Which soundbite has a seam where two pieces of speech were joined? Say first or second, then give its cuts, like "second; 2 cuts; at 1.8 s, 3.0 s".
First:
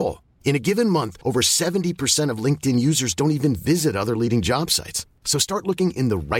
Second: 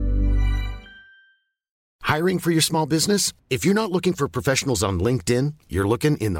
second; 1 cut; at 1.9 s